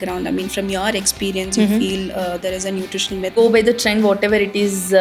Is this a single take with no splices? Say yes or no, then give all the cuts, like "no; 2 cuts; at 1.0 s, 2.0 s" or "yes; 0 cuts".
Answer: no; 1 cut; at 3.3 s